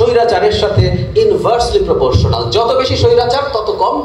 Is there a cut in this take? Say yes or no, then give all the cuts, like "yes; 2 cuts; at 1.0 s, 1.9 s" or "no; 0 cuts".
no; 0 cuts